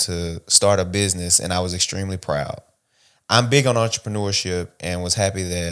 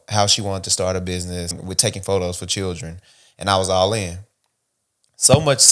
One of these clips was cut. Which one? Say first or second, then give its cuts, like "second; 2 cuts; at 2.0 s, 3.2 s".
second; 1 cut; at 1.6 s